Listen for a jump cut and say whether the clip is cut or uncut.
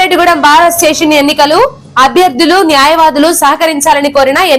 uncut